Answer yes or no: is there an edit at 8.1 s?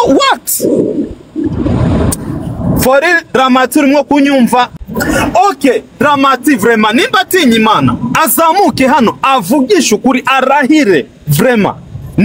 no